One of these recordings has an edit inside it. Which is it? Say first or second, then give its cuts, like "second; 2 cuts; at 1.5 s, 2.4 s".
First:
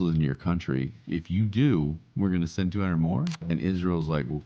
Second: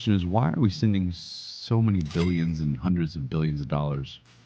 first; 3 cuts; at 1.0 s, 2.0 s, 3.4 s